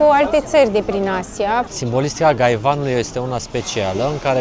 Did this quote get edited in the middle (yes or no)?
yes